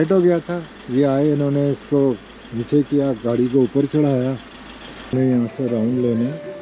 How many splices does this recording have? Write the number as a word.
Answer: one